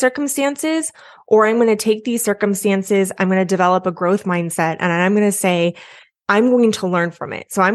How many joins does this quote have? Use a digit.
0